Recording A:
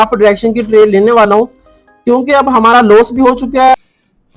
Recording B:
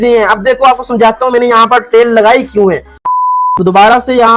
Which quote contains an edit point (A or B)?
B